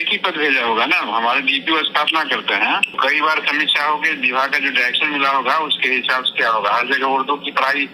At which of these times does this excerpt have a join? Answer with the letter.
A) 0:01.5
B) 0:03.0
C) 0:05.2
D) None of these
B